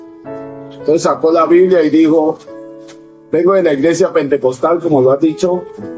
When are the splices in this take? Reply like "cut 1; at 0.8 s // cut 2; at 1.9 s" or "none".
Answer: none

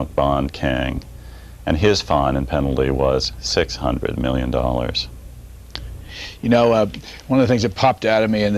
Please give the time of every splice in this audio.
none

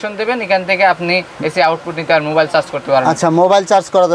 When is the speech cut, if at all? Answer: none

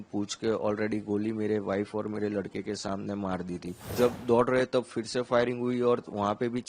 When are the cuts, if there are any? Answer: cut 1; at 3.8 s

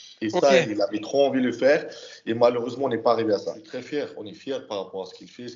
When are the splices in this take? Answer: cut 1; at 3.7 s

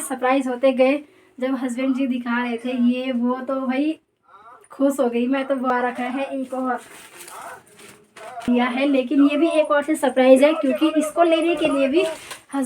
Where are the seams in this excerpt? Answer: cut 1; at 5.7 s // cut 2; at 8.5 s

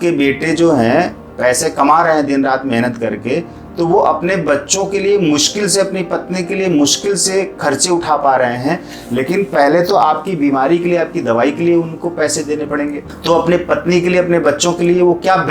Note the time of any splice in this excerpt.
cut 1; at 13.1 s

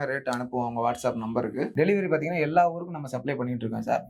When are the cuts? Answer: cut 1; at 1.7 s

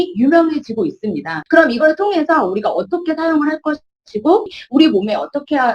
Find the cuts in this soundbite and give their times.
cut 1; at 1.3 s // cut 2; at 4.6 s

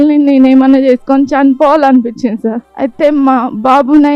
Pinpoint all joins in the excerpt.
cut 1; at 2.7 s

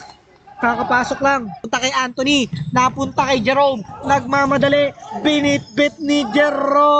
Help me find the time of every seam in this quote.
cut 1; at 1.6 s

